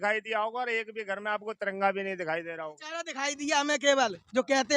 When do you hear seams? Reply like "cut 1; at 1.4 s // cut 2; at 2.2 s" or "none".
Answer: cut 1; at 2.8 s